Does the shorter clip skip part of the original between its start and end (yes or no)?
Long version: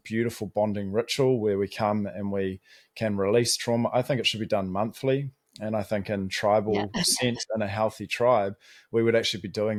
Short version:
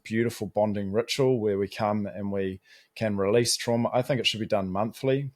no